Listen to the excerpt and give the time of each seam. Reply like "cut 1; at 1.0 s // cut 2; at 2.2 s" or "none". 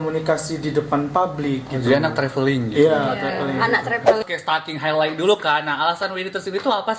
cut 1; at 4.2 s